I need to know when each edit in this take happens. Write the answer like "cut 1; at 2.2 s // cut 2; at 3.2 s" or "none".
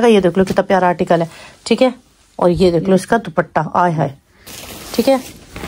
none